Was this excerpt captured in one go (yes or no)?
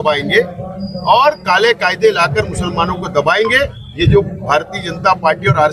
yes